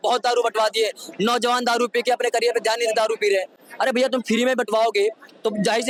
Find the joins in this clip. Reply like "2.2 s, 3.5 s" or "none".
none